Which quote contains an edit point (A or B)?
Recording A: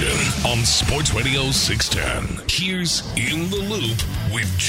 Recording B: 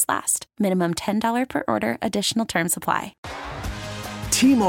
B